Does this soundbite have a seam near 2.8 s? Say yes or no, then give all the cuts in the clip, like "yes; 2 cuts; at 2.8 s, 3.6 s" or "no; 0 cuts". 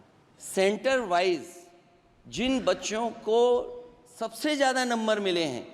no; 0 cuts